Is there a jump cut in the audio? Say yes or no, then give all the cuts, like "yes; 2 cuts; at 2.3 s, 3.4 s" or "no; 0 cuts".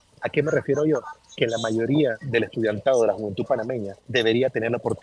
yes; 2 cuts; at 2.2 s, 4.0 s